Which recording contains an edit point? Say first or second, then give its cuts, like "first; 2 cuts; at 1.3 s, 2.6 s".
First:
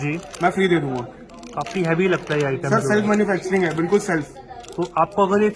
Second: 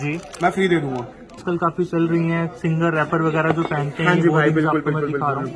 second; 1 cut; at 1.4 s